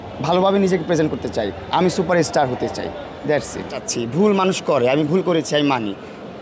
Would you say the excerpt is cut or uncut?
cut